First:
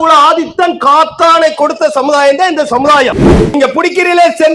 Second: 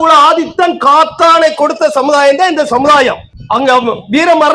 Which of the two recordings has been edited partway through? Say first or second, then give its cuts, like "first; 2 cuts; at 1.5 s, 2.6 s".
first; 1 cut; at 3.5 s